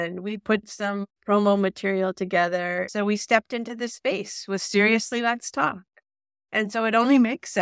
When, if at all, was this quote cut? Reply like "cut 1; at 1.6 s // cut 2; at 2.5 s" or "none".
cut 1; at 2.9 s

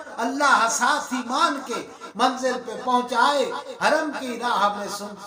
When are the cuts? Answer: none

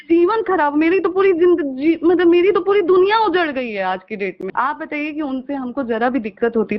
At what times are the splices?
cut 1; at 4.4 s

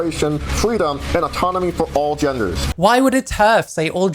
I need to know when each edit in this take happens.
cut 1; at 2.6 s

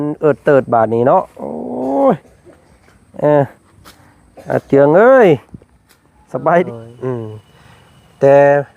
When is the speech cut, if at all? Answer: cut 1; at 6.6 s

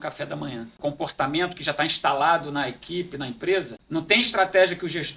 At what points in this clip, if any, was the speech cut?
cut 1; at 0.8 s // cut 2; at 3.8 s

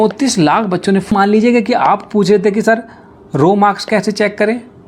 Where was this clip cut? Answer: cut 1; at 1.1 s

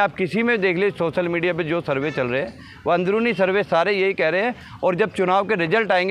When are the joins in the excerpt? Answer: none

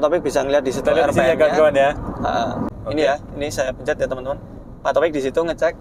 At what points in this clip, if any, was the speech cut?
cut 1; at 2.7 s

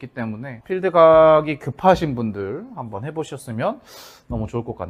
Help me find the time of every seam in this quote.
none

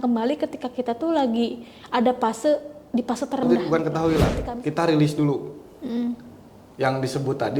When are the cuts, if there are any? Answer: cut 1; at 3.5 s

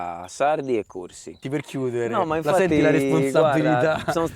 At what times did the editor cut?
cut 1; at 1.4 s

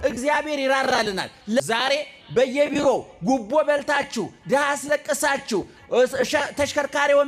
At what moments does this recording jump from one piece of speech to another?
cut 1; at 1.6 s

